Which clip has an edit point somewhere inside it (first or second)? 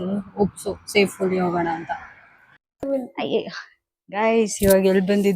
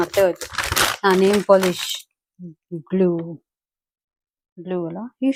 first